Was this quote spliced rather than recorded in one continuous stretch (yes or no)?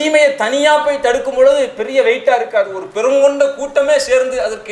no